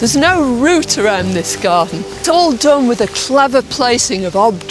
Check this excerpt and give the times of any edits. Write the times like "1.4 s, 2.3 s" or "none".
2.2 s